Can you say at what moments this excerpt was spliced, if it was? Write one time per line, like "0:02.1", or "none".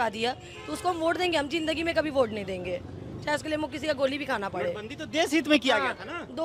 none